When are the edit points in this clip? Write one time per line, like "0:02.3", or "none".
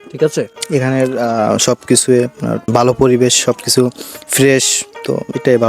0:02.6